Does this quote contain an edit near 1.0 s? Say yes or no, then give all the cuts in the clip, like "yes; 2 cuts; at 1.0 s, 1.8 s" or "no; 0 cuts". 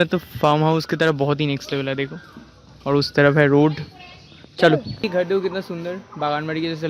no; 1 cut; at 4.9 s